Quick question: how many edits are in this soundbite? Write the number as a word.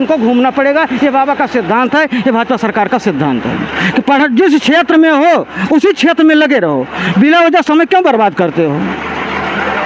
zero